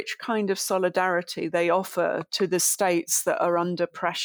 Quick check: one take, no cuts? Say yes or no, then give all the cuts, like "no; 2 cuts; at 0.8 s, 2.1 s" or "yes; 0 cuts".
yes; 0 cuts